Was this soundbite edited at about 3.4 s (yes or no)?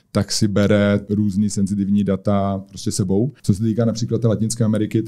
yes